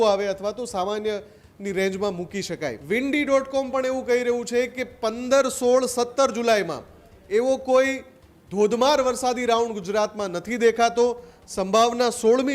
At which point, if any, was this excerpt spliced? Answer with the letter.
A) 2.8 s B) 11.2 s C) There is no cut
A